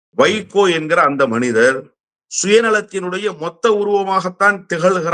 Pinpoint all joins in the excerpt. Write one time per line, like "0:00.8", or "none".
none